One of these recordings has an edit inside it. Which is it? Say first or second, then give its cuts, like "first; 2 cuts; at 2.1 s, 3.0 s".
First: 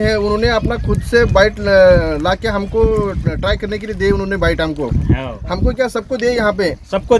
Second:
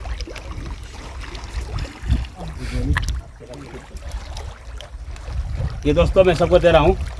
second; 1 cut; at 2.5 s